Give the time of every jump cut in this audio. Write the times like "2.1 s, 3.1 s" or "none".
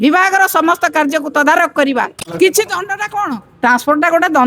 2.3 s